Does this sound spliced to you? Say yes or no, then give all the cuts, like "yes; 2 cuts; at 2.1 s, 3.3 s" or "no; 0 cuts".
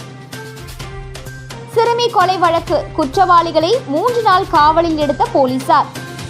no; 0 cuts